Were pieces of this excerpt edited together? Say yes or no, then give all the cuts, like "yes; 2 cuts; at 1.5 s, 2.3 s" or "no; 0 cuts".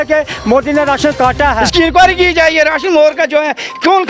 yes; 1 cut; at 1.6 s